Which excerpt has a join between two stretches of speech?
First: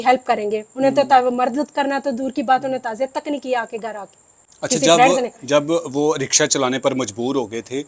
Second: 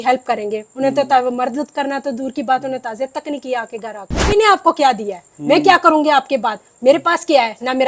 second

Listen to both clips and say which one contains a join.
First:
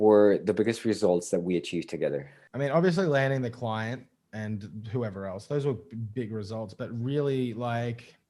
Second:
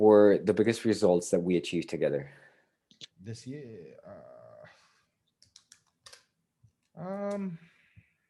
first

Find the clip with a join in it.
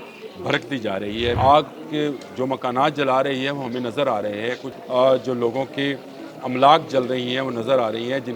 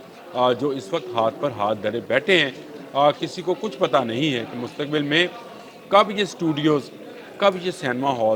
first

